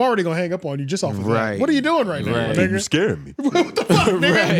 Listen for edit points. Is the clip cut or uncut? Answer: uncut